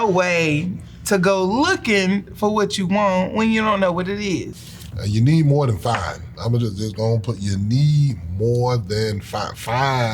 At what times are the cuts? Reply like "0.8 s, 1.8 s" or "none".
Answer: 4.5 s